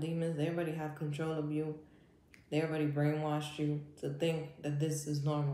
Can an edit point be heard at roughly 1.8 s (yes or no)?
no